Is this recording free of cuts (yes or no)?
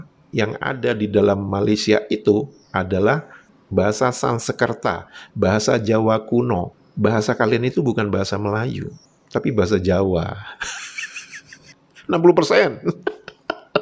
no